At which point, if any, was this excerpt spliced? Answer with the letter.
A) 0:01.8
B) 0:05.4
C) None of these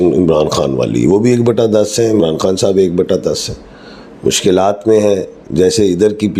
C